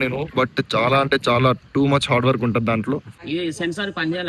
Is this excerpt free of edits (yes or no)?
no